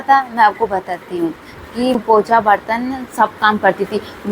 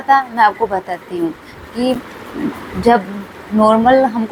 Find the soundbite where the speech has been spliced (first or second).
first